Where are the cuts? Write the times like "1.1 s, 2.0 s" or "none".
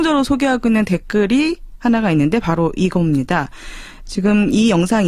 2.6 s